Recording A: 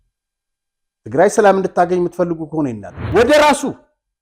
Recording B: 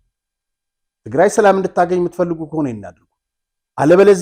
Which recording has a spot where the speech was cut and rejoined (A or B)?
A